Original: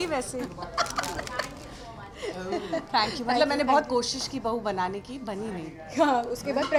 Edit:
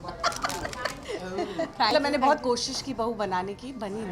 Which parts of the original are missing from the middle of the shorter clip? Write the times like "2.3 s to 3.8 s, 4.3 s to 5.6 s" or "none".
1.5 s to 2.1 s, 3.1 s to 3.4 s